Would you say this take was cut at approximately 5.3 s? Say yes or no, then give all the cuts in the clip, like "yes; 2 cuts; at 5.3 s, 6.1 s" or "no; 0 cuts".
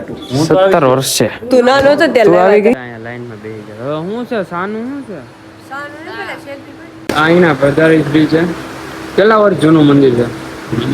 no; 2 cuts; at 2.8 s, 6.9 s